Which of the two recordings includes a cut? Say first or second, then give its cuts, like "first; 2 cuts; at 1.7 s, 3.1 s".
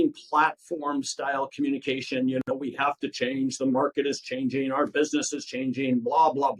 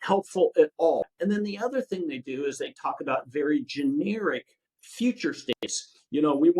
second; 1 cut; at 1.0 s